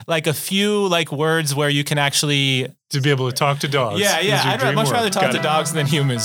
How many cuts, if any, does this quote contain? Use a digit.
1